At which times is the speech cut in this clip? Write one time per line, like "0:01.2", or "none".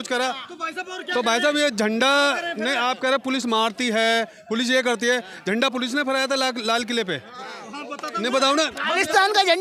none